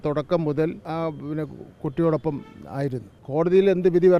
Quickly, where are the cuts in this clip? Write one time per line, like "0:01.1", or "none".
0:00.8
0:03.1